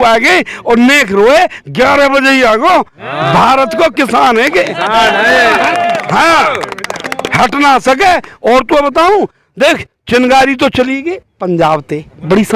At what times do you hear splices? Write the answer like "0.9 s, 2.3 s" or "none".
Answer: none